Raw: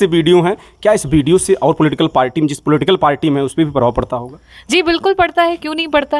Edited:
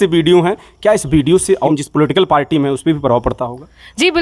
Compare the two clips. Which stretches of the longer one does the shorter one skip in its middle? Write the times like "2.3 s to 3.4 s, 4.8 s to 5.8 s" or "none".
1.7 s to 2.4 s